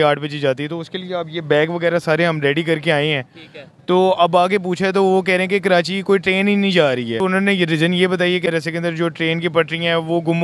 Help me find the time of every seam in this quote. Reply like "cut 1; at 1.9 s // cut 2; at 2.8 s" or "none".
cut 1; at 7.2 s // cut 2; at 8.5 s